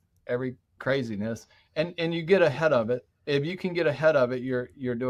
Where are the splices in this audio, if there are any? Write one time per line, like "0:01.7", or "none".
none